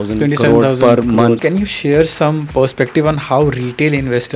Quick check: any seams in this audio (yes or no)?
yes